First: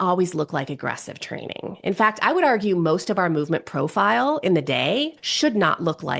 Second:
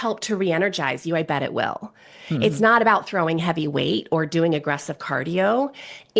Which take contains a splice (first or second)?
first